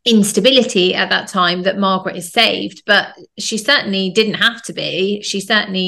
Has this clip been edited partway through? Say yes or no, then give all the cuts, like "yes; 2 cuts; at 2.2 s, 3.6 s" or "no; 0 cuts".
no; 0 cuts